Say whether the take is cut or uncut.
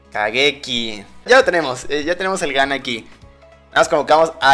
cut